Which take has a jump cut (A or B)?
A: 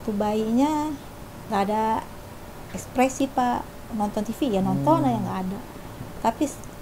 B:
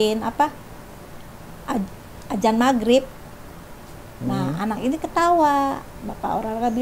B